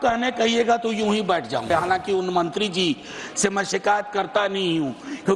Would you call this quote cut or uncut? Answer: cut